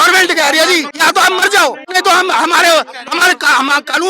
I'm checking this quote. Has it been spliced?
yes; 2 cuts; at 0.9 s, 1.8 s

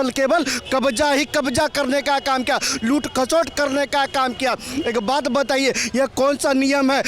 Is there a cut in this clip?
no; 0 cuts

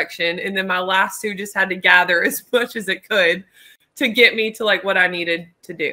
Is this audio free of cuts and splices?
yes; 0 cuts

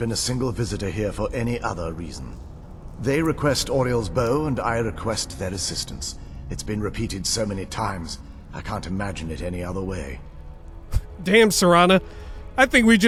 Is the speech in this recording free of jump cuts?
yes; 0 cuts

